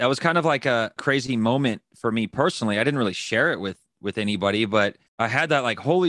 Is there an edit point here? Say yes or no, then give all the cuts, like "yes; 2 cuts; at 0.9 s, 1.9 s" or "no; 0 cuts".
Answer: yes; 2 cuts; at 1.0 s, 5.0 s